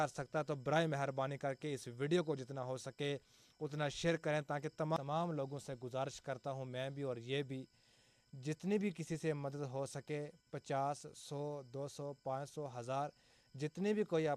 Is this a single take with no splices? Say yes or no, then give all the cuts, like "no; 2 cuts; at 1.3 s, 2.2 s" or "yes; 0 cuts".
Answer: no; 1 cut; at 5.0 s